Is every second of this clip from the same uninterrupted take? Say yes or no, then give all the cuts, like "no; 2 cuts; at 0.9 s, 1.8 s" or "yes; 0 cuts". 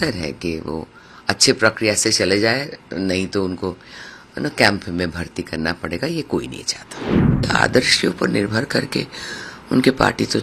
no; 1 cut; at 7.4 s